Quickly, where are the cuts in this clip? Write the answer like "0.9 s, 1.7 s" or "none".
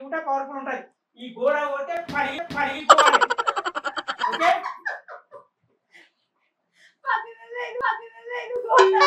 none